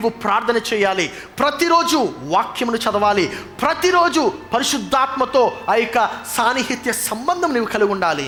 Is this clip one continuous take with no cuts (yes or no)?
yes